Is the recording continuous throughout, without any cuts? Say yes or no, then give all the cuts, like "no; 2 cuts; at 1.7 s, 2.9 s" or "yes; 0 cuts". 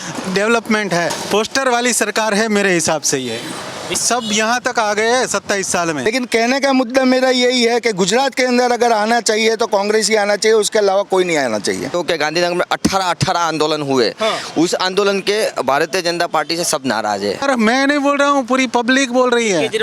no; 5 cuts; at 1.2 s, 3.9 s, 6.1 s, 11.9 s, 17.4 s